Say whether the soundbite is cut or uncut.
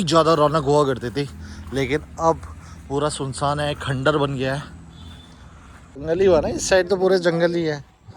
cut